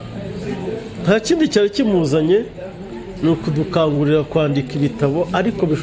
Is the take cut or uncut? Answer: uncut